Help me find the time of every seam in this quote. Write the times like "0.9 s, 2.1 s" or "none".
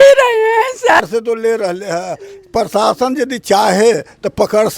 1.0 s